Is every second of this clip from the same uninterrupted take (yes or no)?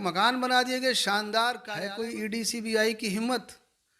no